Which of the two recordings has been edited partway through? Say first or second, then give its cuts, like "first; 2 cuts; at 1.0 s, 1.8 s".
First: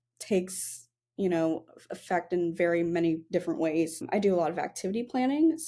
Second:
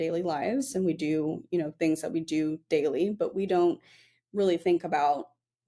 first; 1 cut; at 4.0 s